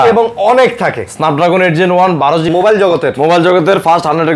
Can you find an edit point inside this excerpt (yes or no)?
yes